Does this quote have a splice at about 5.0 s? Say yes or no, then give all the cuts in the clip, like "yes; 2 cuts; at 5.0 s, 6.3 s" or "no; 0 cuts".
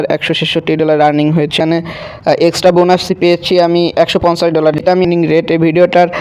yes; 2 cuts; at 1.6 s, 5.0 s